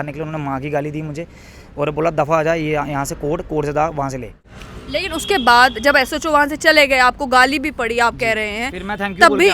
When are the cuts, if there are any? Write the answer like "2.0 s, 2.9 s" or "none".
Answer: 4.5 s